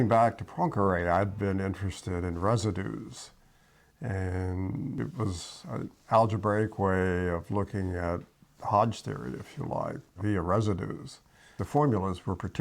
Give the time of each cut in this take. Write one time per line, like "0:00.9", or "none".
0:05.0
0:10.2
0:11.6